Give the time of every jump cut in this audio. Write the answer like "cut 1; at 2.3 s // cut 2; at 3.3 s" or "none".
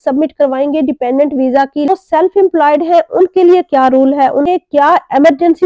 cut 1; at 1.9 s // cut 2; at 4.5 s